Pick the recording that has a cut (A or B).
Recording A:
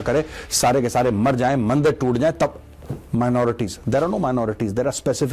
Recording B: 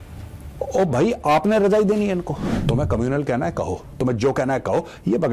B